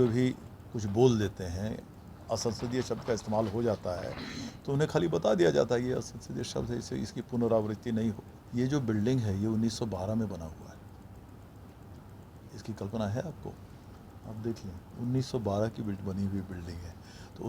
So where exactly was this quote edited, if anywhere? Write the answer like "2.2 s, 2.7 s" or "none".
8.3 s

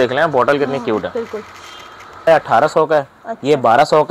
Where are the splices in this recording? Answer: 2.3 s

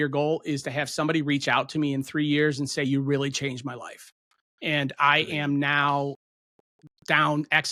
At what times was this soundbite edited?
none

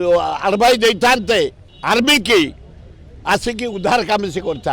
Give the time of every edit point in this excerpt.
1.7 s

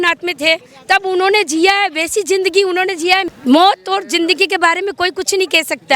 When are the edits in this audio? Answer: 3.3 s

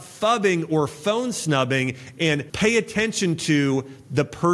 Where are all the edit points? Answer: 2.5 s

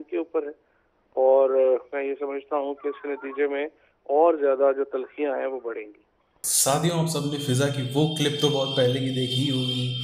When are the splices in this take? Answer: none

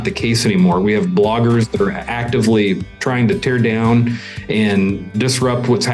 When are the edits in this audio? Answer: 2.9 s

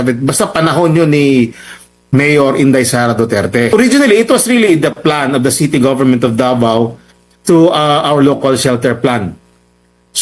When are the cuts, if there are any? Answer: 3.7 s

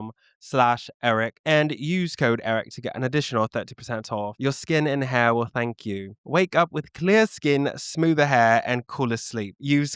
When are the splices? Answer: none

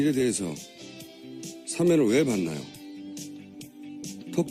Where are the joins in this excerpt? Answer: none

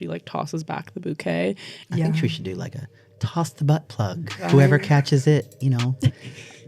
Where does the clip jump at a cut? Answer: 1.7 s, 4.4 s

